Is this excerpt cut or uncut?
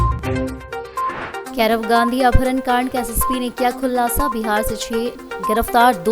cut